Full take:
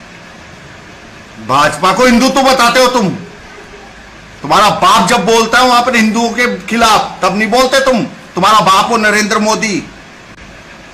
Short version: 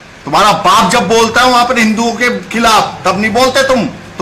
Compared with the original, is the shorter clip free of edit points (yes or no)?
yes